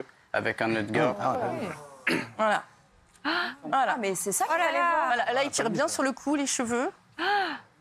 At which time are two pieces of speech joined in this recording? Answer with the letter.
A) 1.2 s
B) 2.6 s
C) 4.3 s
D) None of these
A